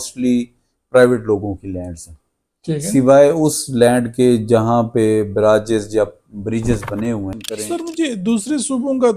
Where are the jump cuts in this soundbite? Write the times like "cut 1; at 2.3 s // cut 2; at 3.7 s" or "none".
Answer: cut 1; at 7.4 s